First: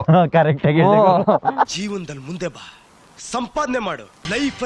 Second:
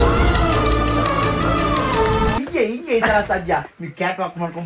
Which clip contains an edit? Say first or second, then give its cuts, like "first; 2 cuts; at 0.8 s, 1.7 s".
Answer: second; 2 cuts; at 2.4 s, 3.7 s